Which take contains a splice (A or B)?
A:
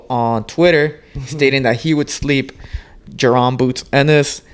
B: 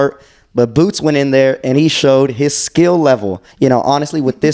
B